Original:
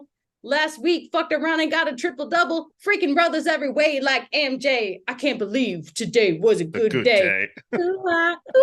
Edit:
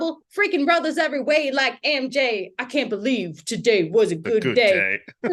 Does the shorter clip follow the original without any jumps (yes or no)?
yes